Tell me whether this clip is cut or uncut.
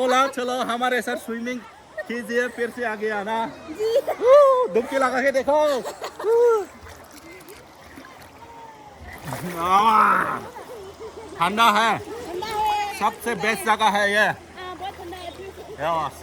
uncut